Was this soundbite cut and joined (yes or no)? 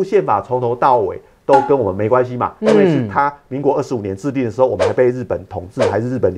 no